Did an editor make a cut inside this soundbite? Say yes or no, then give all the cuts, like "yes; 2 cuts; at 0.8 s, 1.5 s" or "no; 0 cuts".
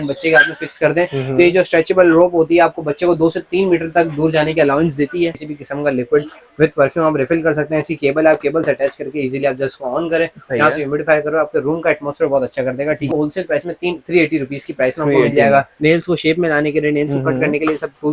yes; 3 cuts; at 5.4 s, 13.1 s, 15.7 s